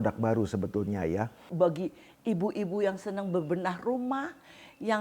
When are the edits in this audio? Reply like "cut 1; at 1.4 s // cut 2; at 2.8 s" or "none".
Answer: cut 1; at 1.4 s

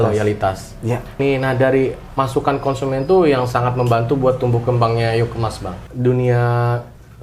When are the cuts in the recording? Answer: cut 1; at 1.2 s // cut 2; at 5.8 s

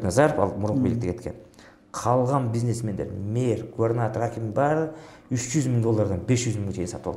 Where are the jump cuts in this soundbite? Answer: none

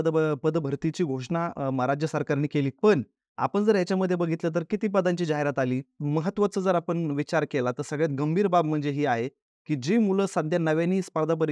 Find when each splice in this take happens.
cut 1; at 6.0 s

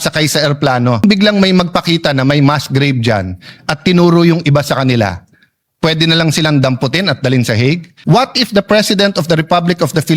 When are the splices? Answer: cut 1; at 1.0 s // cut 2; at 7.9 s

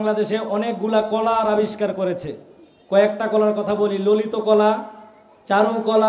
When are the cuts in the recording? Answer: none

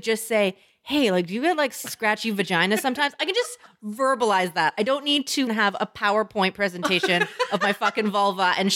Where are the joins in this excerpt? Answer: cut 1; at 5.5 s

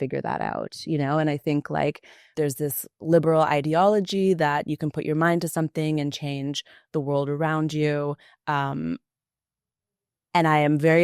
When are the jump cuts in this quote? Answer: cut 1; at 2.3 s

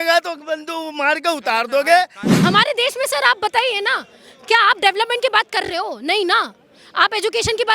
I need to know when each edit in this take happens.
cut 1; at 2.3 s

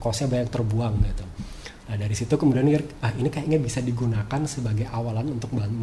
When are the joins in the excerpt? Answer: none

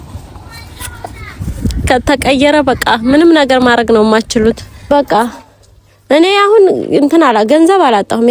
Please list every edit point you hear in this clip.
cut 1; at 4.9 s

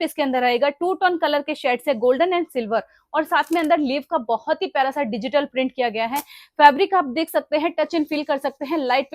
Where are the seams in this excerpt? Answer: none

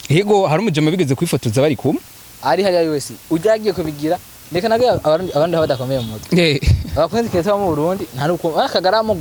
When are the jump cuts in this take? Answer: none

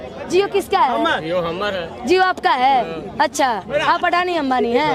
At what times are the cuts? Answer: none

